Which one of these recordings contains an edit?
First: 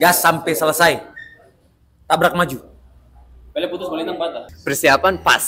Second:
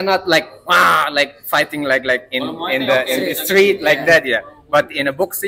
first; 1 cut; at 4.5 s

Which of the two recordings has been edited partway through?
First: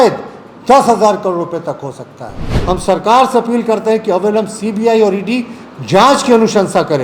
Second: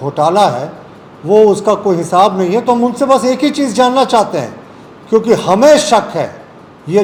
first; 1 cut; at 2.5 s

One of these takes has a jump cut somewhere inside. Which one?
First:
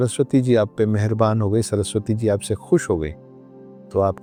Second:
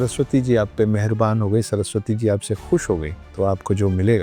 second; 1 cut; at 3.2 s

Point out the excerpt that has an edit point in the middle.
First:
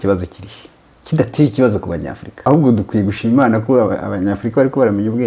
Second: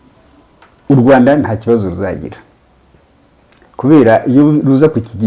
first; 1 cut; at 2.5 s

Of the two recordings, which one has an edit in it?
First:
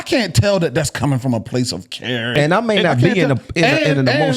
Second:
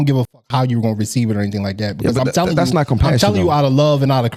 first; 1 cut; at 2.3 s

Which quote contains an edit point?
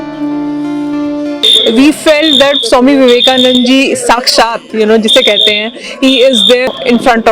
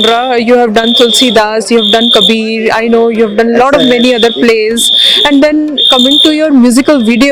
first; 1 cut; at 1.5 s

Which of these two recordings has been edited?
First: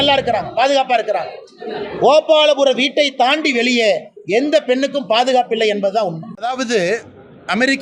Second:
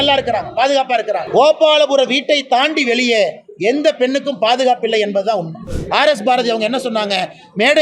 second; 2 cuts; at 1.2 s, 5.6 s

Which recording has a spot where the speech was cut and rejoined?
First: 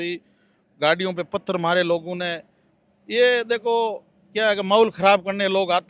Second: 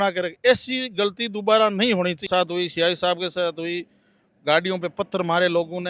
second; 1 cut; at 2.2 s

